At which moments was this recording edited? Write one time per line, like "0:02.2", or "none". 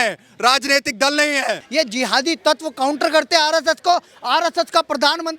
0:01.6